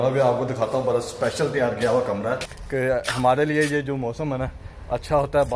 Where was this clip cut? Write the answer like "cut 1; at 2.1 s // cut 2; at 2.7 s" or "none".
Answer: cut 1; at 2.5 s